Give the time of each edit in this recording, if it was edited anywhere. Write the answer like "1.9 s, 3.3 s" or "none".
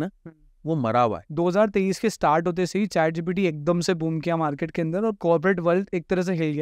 1.2 s, 5.2 s

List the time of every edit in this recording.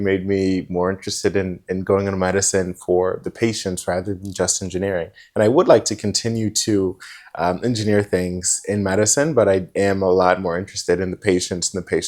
none

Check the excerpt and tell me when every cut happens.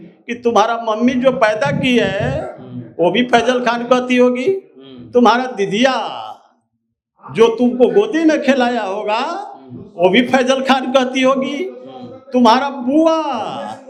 none

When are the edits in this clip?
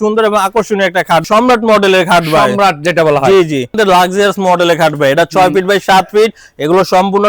1.3 s, 3.7 s

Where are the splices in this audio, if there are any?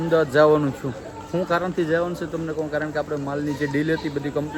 none

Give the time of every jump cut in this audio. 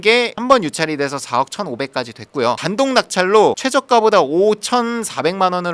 none

